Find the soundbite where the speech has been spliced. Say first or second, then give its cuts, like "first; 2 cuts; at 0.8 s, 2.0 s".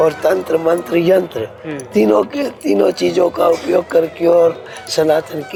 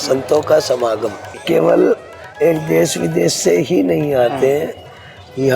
second; 1 cut; at 1.4 s